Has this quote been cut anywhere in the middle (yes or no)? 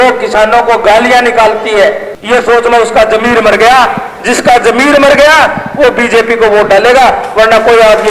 yes